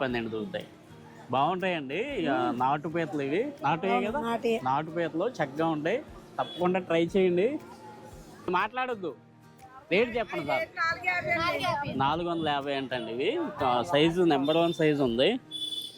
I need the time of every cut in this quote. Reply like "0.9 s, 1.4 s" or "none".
8.5 s